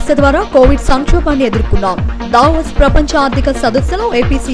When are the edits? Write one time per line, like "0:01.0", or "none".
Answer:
none